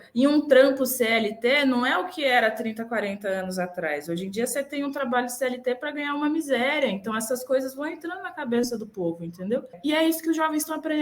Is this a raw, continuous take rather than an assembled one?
no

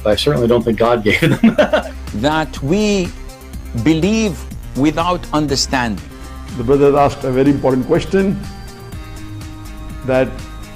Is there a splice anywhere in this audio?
yes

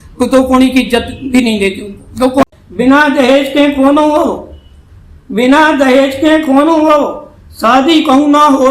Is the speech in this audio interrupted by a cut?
yes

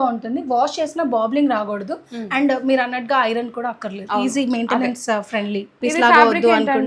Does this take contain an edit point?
yes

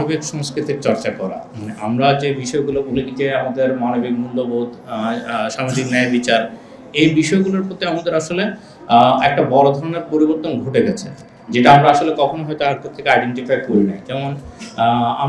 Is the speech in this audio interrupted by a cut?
no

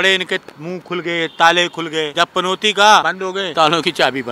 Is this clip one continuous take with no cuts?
no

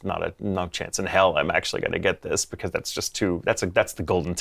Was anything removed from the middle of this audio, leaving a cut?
no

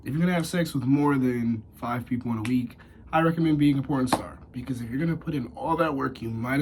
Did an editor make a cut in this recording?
no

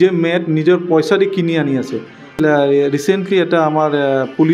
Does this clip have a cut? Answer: yes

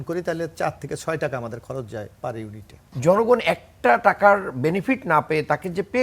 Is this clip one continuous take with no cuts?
no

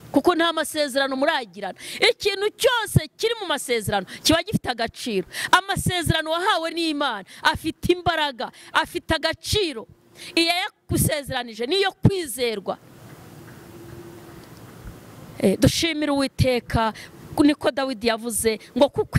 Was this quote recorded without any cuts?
yes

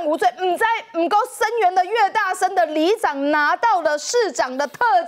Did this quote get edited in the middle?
no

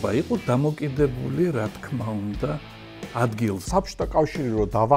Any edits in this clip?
yes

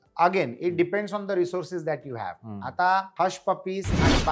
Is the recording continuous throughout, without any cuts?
no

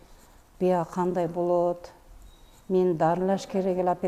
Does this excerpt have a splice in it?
no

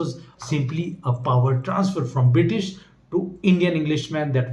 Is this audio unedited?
yes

